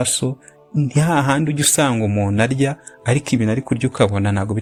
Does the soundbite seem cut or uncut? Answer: uncut